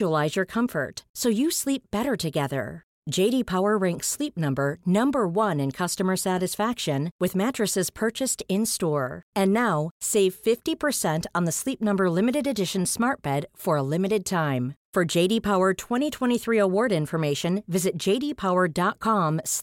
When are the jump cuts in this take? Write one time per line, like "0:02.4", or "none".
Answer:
none